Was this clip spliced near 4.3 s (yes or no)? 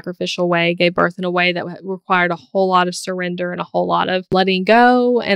yes